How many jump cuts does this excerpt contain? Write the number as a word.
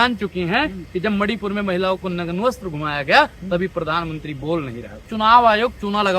one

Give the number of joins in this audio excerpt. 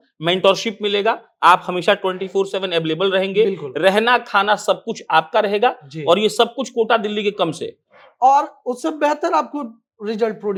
zero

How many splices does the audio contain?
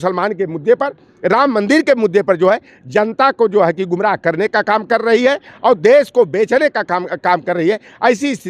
zero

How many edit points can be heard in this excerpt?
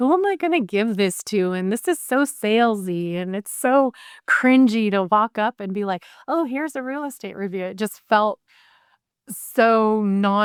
zero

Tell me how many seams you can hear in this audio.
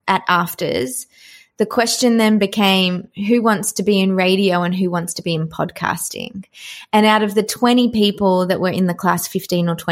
zero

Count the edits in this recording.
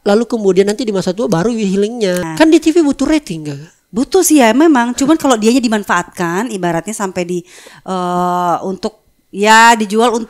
one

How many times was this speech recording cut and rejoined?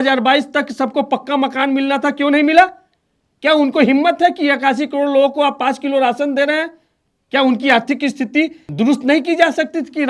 one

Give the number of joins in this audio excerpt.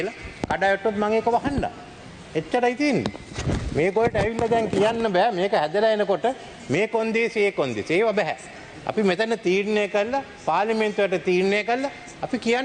zero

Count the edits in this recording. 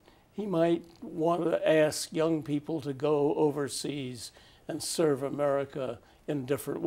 zero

